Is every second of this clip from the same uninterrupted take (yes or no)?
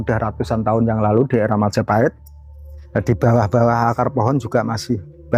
yes